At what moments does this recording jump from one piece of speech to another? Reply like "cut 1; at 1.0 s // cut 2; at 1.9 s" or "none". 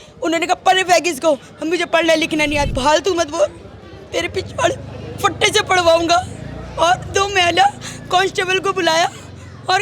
cut 1; at 2.7 s